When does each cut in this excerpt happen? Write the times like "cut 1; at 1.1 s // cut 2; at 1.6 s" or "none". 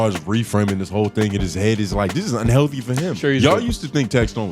cut 1; at 3.2 s